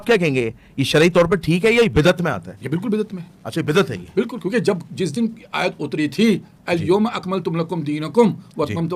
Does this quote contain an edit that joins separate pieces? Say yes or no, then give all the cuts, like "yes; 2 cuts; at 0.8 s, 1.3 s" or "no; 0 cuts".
no; 0 cuts